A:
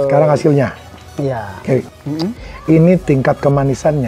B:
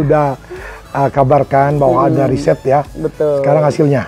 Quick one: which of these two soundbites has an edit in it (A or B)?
A